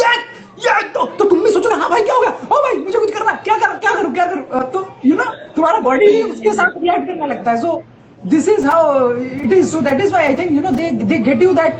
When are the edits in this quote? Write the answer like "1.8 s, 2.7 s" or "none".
none